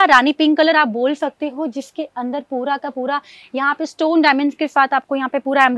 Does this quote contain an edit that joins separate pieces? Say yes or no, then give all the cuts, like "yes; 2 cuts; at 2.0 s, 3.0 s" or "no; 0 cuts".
no; 0 cuts